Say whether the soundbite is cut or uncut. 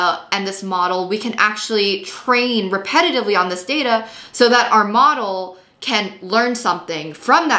uncut